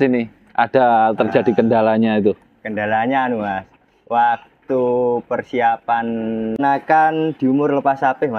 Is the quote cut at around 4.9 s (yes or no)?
no